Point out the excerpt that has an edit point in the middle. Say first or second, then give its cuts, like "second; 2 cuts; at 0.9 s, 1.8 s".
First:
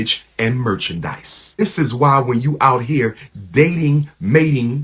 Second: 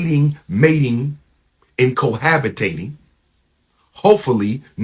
first; 1 cut; at 1.6 s